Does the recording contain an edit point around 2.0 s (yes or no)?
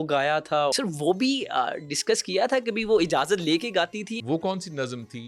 no